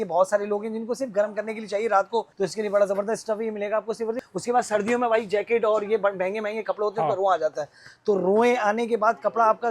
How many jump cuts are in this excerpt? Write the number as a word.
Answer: two